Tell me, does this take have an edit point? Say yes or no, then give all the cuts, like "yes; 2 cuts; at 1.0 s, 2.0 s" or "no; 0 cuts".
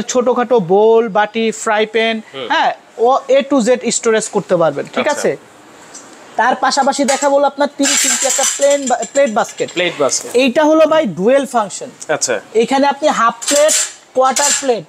no; 0 cuts